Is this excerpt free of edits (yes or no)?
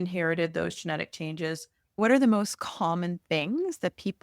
no